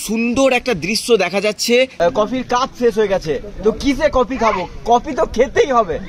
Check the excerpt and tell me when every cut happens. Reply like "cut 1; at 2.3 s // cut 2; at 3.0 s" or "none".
cut 1; at 1.9 s